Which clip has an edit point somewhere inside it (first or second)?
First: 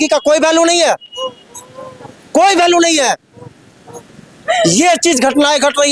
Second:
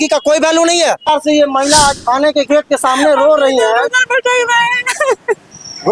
second